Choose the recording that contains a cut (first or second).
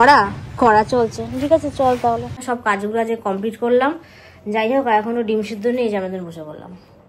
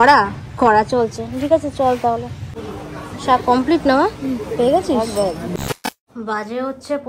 first